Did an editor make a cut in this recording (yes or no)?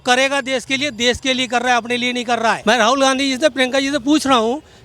yes